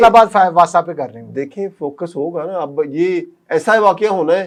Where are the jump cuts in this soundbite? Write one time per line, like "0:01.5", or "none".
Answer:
none

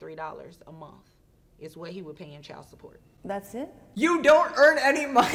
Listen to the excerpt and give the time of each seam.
none

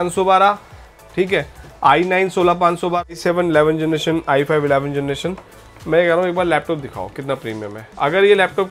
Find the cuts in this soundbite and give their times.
0:03.1

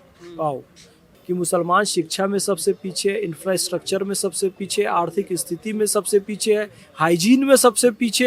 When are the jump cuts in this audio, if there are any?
0:01.1

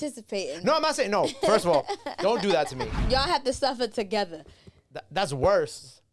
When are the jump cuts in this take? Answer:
0:02.9

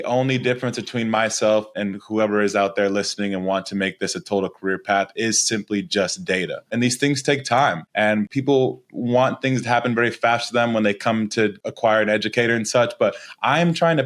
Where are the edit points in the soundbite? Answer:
0:01.7
0:06.7
0:08.2
0:11.6

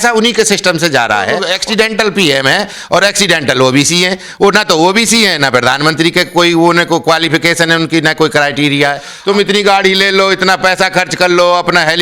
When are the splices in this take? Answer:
0:01.5
0:09.1

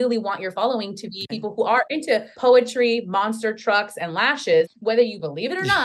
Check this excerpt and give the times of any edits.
0:01.5
0:04.8

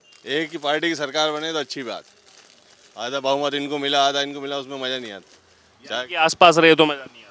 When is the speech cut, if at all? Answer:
none

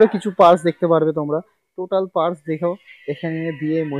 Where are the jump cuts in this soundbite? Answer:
none

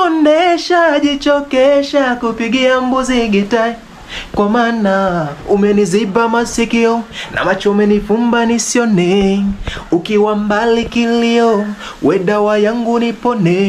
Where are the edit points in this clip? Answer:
none

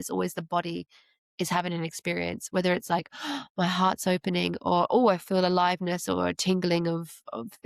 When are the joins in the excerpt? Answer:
none

